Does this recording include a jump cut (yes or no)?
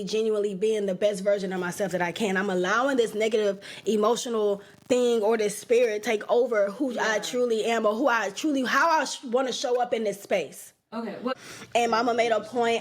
yes